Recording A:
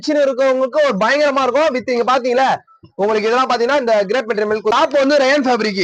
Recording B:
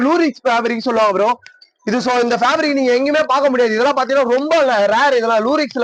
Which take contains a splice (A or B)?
A